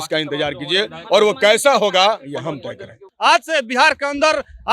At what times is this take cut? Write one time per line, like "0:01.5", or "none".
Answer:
0:03.0